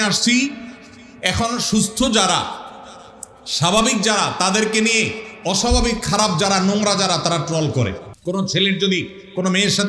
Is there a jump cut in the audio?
yes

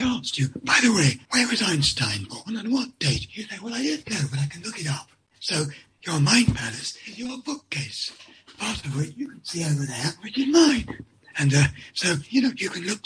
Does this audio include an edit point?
yes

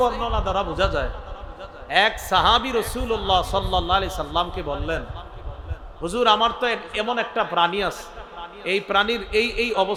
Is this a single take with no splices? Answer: yes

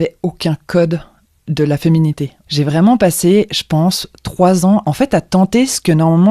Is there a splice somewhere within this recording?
yes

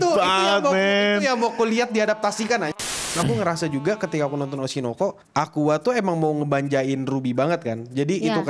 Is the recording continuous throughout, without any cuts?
no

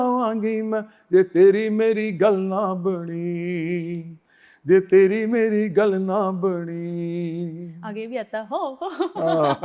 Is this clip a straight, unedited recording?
yes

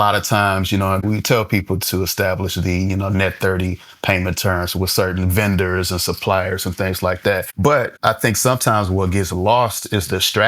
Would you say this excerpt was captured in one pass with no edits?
no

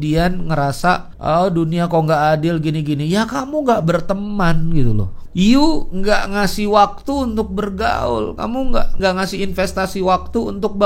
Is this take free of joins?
no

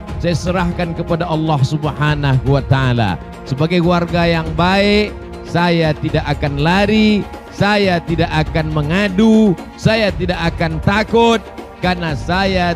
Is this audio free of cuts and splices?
yes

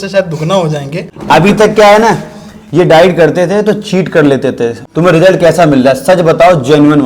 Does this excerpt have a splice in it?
yes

